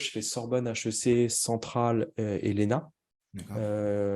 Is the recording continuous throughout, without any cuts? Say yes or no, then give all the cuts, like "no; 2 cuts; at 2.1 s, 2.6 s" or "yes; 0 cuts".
yes; 0 cuts